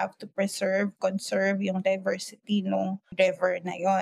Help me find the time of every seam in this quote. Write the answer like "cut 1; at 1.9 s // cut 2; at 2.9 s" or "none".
cut 1; at 3.1 s

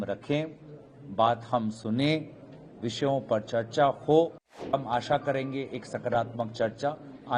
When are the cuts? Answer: cut 1; at 4.8 s

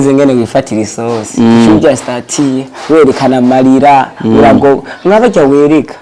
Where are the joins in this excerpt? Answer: none

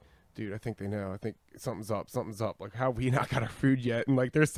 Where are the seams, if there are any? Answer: none

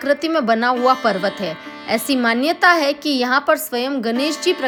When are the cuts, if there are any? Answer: none

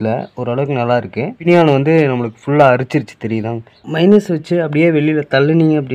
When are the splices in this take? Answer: cut 1; at 1.4 s // cut 2; at 3.8 s

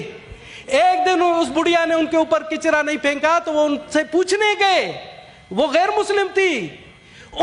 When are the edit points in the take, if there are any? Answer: none

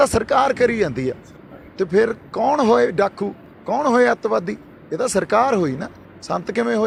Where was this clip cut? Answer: none

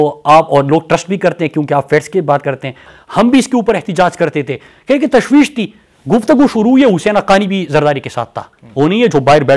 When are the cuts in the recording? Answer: cut 1; at 2.9 s

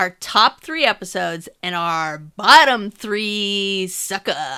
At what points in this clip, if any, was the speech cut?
none

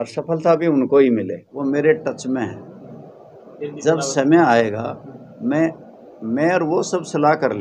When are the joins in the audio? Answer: cut 1; at 1.4 s

